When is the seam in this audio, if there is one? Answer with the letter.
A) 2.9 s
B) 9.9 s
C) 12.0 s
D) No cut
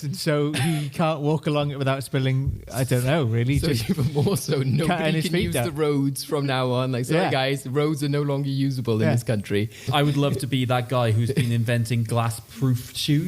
B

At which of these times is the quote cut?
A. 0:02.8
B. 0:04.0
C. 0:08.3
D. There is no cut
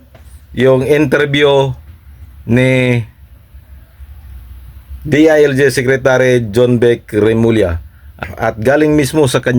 C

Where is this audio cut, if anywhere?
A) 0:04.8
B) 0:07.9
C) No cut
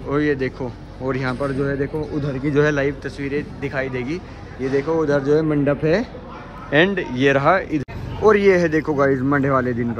B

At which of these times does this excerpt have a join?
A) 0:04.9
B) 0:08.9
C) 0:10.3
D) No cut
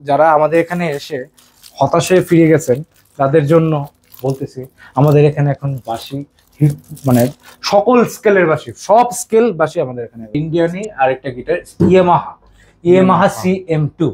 C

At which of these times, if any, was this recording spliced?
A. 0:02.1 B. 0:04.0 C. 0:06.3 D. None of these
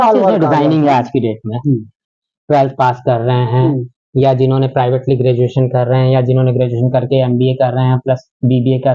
A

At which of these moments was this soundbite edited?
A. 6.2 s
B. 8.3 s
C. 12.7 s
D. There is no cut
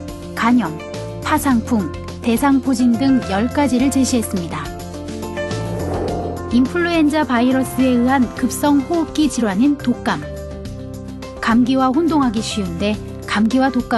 A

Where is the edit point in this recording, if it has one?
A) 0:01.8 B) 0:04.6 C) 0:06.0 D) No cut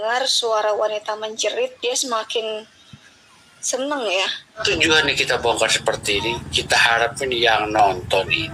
B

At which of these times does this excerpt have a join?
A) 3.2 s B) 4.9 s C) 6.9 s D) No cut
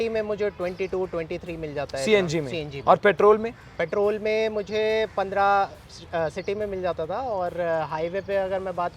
D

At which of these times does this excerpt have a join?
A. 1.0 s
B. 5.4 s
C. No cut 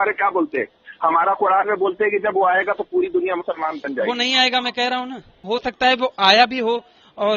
B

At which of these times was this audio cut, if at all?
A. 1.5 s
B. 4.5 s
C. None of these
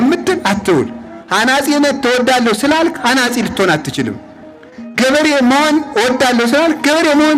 C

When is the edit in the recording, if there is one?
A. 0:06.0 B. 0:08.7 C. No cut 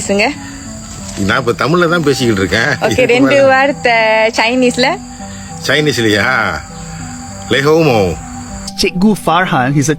B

